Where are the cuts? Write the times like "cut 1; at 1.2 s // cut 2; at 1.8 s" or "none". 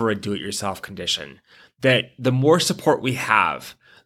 none